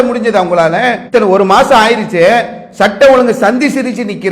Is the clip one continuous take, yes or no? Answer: no